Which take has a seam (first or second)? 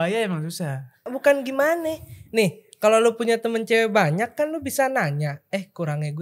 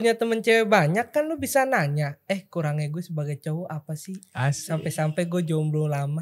first